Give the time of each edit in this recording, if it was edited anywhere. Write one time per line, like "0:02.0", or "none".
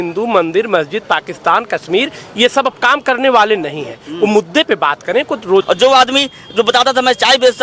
0:05.7

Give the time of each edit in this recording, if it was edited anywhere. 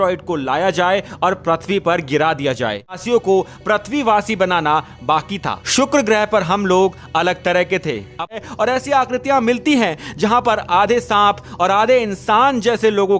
0:03.0
0:08.3

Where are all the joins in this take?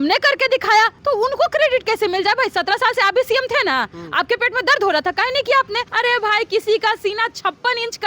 0:01.0
0:05.8

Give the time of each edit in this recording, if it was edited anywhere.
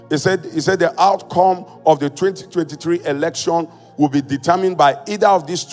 none

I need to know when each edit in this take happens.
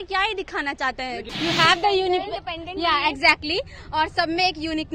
0:01.3

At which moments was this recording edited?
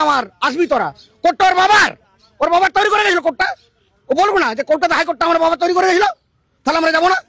none

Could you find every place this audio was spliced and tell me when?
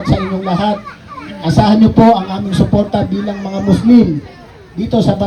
none

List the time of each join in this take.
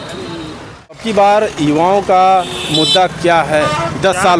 0:00.9

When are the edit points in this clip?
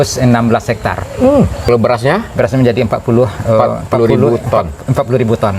0:01.6

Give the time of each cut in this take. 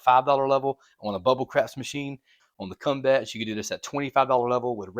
0:02.4

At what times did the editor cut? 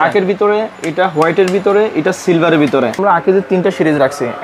0:03.0

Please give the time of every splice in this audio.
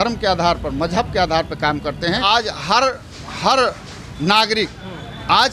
0:02.2

